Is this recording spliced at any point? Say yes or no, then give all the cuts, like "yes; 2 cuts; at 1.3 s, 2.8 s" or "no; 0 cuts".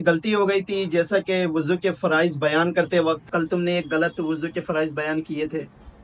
yes; 1 cut; at 3.2 s